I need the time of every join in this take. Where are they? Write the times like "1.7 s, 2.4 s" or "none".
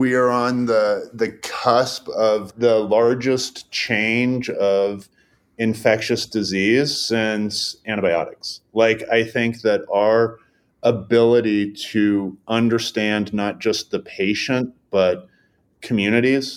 2.5 s